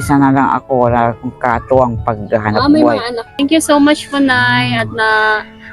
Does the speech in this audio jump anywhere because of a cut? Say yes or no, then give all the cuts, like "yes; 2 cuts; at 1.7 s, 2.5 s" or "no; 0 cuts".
yes; 1 cut; at 3.2 s